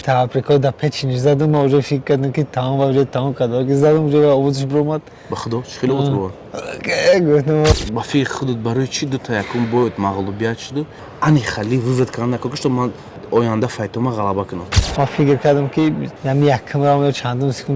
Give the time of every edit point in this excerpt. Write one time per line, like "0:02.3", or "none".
0:07.7
0:11.0
0:14.8
0:16.1